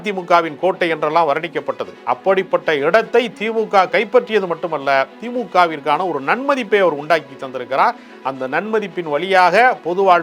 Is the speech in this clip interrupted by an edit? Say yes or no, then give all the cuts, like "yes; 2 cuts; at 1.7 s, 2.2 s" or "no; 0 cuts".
yes; 1 cut; at 1.9 s